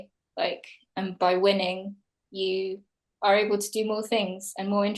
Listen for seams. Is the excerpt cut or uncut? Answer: uncut